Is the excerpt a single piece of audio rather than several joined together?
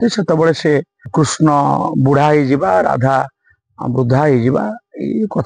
no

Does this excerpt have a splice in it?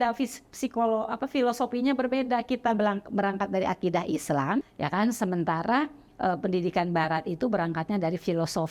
yes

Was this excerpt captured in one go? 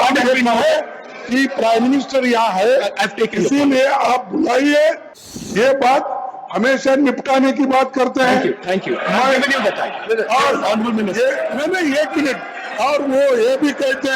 no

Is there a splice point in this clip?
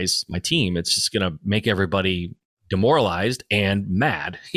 no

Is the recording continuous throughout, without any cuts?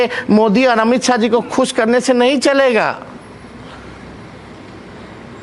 yes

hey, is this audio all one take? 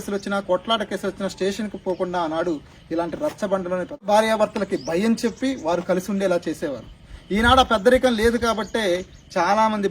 no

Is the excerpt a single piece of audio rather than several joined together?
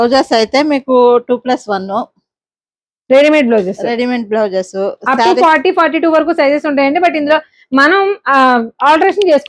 yes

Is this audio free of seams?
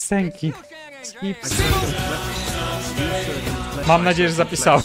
no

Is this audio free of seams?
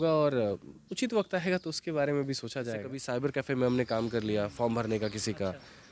no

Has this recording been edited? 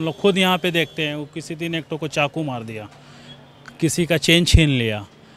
no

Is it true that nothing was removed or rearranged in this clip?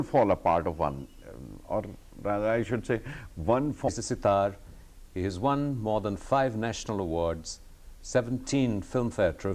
yes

